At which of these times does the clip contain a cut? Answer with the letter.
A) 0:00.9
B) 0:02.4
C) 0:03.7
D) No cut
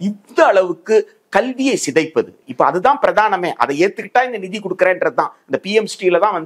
B